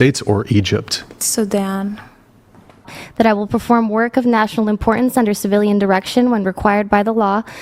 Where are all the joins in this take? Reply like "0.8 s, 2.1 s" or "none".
2.8 s